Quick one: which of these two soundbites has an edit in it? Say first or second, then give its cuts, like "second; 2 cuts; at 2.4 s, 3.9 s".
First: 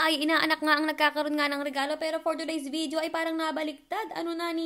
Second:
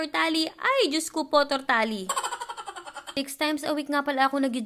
second; 1 cut; at 3.1 s